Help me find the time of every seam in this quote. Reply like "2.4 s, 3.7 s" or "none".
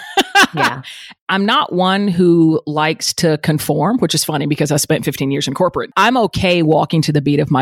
1.1 s, 5.9 s